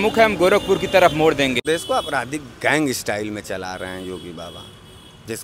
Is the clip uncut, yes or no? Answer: no